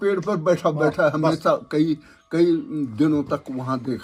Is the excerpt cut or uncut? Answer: uncut